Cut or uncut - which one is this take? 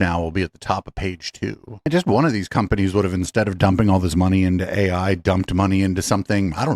cut